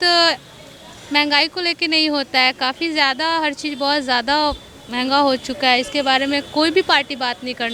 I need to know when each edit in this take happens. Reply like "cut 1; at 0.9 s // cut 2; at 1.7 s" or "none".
none

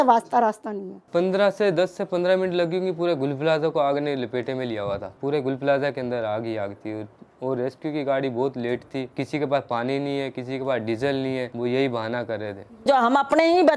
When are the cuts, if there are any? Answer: cut 1; at 1.1 s // cut 2; at 5.1 s

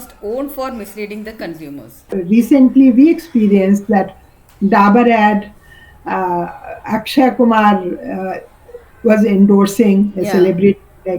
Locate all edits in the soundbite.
cut 1; at 2.1 s

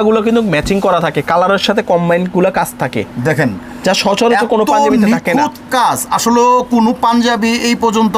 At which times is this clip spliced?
none

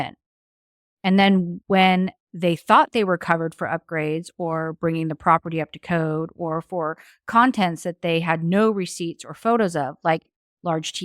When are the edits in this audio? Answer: cut 1; at 1.6 s

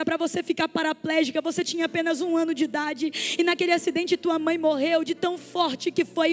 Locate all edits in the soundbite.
none

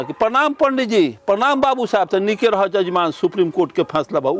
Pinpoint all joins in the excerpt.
none

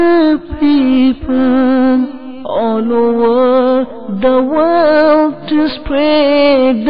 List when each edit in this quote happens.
none

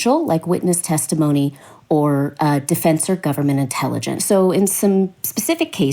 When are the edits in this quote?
cut 1; at 4.2 s

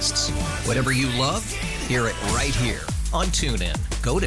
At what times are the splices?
none

